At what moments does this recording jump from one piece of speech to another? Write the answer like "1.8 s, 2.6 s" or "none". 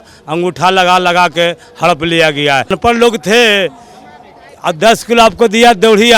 2.7 s